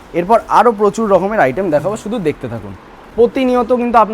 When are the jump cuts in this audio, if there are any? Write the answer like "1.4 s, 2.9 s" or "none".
3.1 s